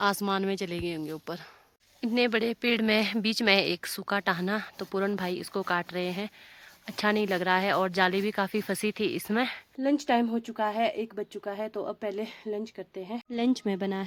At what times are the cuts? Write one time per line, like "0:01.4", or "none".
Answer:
none